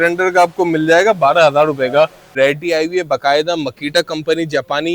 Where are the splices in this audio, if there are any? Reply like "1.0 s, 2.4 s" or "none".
2.3 s